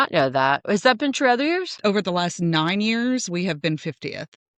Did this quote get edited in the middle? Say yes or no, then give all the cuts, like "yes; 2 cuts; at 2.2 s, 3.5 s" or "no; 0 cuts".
yes; 1 cut; at 1.7 s